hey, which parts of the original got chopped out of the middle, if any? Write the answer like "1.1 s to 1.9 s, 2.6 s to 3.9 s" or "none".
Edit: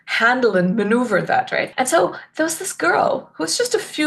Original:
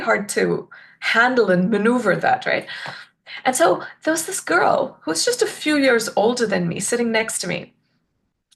2.6 s to 3.4 s